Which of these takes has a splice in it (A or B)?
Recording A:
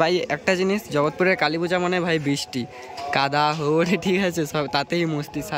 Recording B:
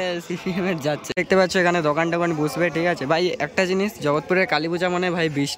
B